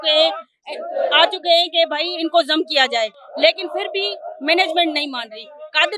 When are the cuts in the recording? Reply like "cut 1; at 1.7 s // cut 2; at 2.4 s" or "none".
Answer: none